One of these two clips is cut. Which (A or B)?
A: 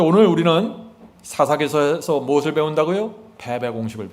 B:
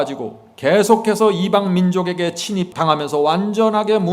B